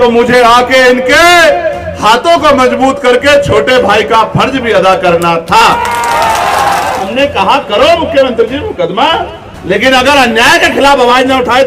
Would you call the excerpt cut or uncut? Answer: cut